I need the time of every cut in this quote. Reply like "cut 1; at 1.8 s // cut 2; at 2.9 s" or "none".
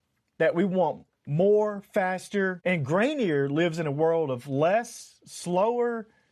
cut 1; at 2.6 s